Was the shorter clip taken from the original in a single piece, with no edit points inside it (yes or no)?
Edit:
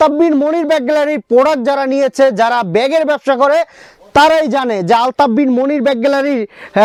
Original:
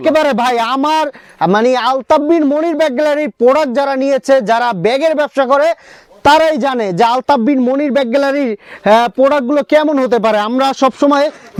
yes